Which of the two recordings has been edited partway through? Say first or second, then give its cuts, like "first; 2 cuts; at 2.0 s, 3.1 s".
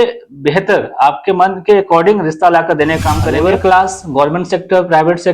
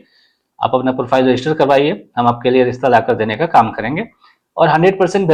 first; 1 cut; at 3.3 s